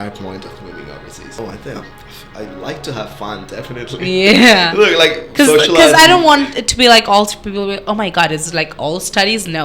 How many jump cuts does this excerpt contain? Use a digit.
1